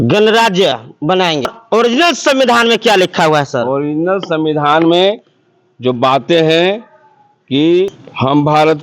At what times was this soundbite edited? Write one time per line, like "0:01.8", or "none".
0:01.6

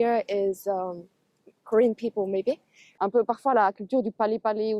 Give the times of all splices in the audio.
0:02.8

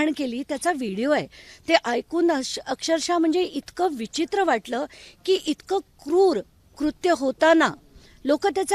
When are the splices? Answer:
none

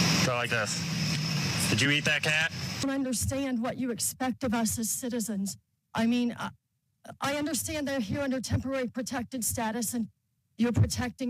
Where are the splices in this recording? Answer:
0:02.8

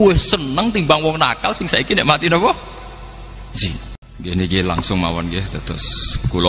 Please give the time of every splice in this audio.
0:04.0

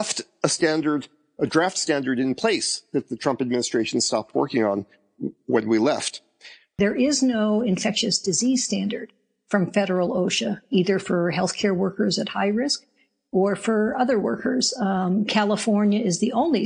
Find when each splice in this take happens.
0:06.8

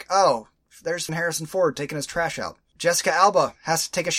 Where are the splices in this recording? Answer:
0:01.1
0:02.6

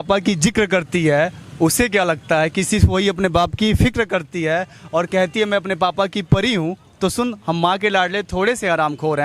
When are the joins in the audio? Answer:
none

